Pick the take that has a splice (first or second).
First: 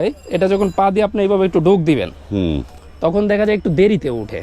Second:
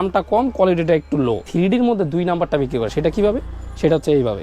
second